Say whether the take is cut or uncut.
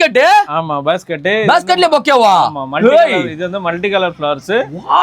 uncut